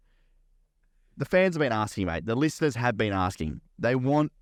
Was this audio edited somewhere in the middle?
no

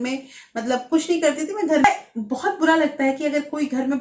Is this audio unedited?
no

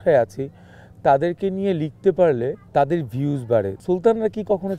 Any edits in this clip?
yes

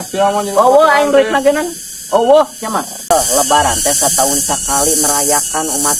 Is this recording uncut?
no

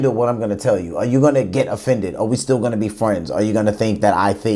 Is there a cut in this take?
no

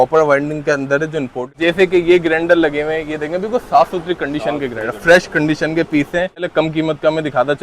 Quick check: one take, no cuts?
no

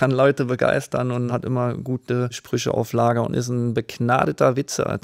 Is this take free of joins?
no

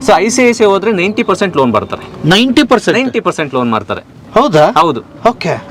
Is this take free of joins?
yes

